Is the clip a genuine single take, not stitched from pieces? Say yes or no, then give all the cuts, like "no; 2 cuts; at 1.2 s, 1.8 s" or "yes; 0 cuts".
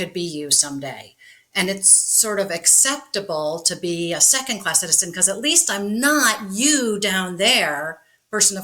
yes; 0 cuts